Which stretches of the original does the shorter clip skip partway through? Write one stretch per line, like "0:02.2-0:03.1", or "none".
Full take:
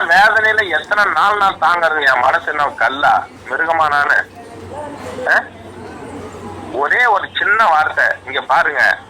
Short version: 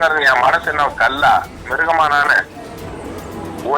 0:04.6-0:05.9